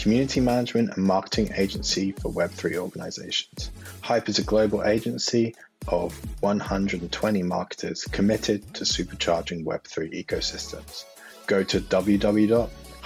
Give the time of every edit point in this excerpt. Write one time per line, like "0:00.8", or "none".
none